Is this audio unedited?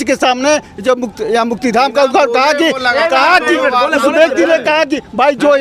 yes; 0 cuts

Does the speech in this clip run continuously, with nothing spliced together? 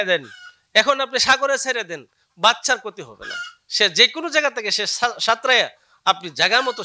yes; 0 cuts

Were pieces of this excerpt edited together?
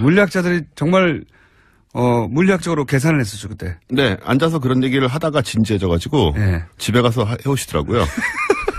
yes; 1 cut; at 5.5 s

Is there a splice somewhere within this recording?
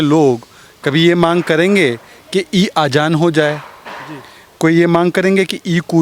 no; 0 cuts

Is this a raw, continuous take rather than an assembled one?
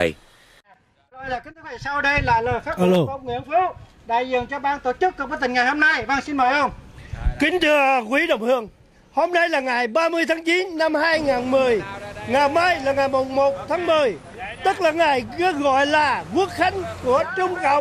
yes; 0 cuts

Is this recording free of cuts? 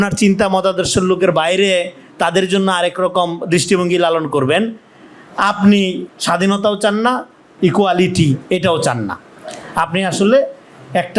no; 2 cuts; at 6.1 s, 7.5 s

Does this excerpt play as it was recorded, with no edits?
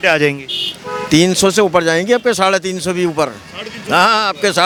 yes; 0 cuts

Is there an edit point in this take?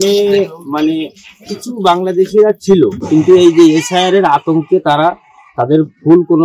yes; 1 cut; at 3.0 s

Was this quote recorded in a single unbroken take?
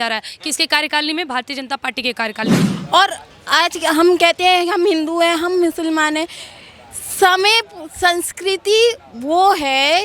no; 1 cut; at 2.7 s

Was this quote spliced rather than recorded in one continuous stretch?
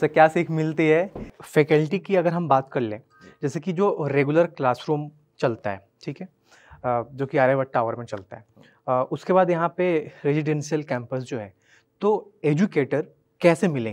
yes; 1 cut; at 1.3 s

